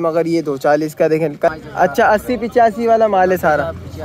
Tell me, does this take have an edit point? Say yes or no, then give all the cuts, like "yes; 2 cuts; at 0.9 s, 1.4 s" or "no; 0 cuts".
yes; 1 cut; at 1.5 s